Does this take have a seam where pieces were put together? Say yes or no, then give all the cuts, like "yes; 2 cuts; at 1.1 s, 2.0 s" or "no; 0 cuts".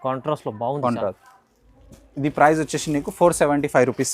yes; 1 cut; at 1.3 s